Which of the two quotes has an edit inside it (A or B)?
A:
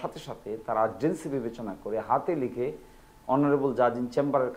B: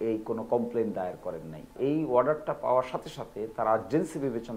B